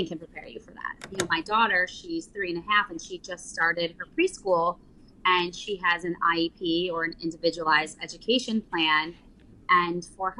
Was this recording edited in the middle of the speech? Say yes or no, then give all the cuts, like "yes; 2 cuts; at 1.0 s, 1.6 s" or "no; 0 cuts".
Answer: yes; 1 cut; at 1.1 s